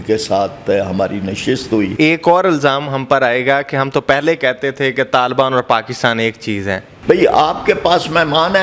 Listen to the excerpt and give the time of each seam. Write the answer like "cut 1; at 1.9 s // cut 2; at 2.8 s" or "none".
cut 1; at 1.9 s // cut 2; at 6.9 s